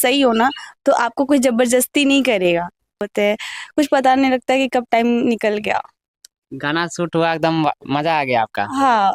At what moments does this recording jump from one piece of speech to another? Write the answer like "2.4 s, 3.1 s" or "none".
3.1 s